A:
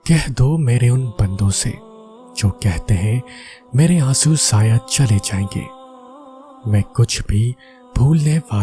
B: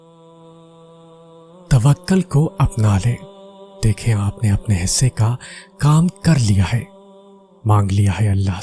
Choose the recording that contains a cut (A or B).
B